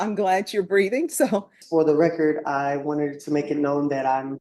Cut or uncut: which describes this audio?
cut